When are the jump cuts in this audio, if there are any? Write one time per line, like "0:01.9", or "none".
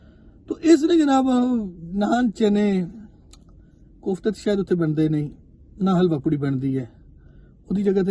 none